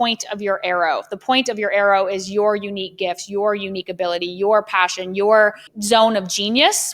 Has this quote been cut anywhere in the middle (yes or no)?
yes